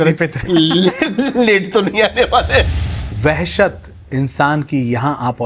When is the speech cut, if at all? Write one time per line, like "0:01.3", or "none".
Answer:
0:02.8